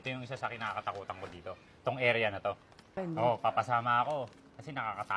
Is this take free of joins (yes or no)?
no